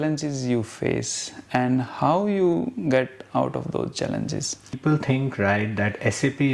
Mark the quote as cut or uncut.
cut